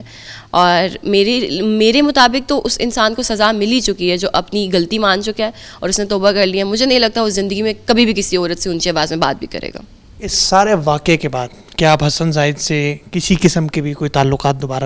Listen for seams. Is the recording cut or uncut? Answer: uncut